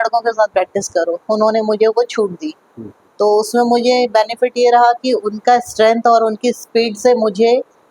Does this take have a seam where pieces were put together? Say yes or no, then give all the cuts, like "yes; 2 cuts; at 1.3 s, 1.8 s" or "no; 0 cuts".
no; 0 cuts